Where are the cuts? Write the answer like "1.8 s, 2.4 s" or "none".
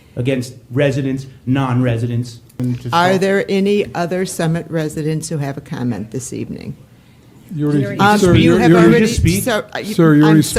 2.6 s

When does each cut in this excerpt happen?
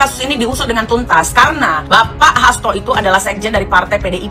1.8 s

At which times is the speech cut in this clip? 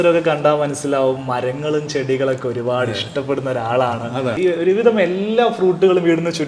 4.4 s

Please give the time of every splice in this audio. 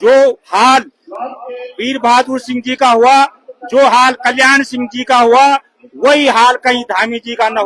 none

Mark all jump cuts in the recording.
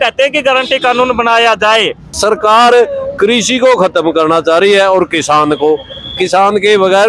2.2 s

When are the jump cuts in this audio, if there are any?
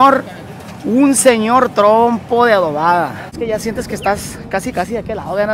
3.3 s

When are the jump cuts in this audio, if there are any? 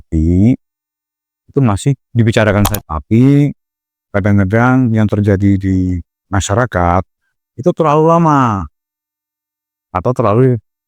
2.7 s

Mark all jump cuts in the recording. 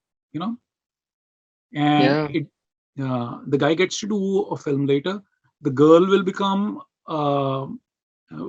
none

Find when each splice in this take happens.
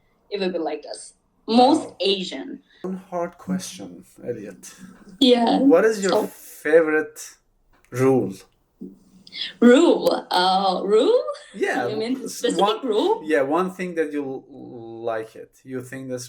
2.9 s

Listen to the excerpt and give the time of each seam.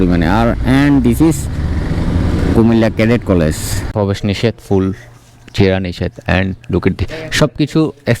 3.9 s

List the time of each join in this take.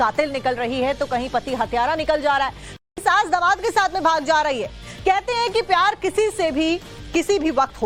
none

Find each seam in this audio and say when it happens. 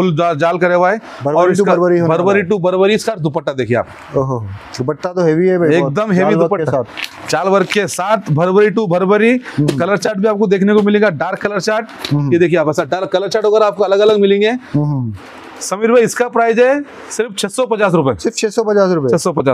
none

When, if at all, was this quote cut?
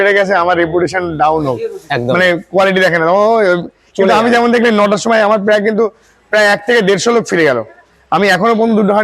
none

